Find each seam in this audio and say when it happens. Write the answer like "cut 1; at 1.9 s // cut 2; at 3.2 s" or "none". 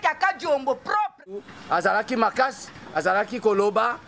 cut 1; at 1.5 s